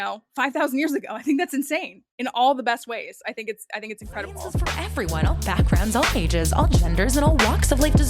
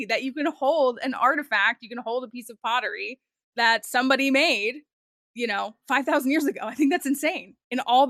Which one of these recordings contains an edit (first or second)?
first